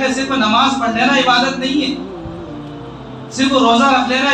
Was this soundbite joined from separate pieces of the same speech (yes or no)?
yes